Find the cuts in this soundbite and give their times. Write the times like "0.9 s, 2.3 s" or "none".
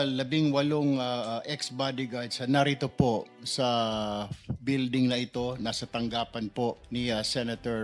6.8 s